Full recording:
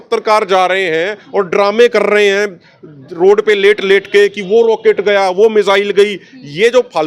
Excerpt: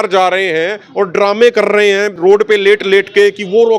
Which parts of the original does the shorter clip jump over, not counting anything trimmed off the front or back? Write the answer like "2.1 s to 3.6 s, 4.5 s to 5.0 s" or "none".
2.5 s to 3.1 s

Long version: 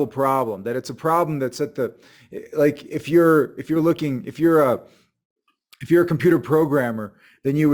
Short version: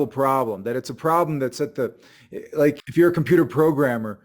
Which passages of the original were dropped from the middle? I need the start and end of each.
2.8 s to 5.8 s

